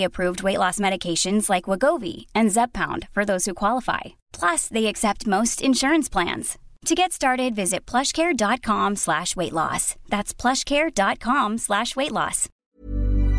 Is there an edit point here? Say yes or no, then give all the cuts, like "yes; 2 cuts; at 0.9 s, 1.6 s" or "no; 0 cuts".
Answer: yes; 1 cut; at 12.5 s